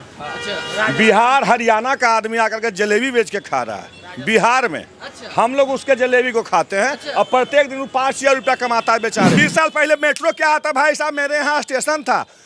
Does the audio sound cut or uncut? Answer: cut